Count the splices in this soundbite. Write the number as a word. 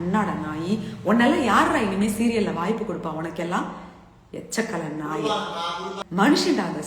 one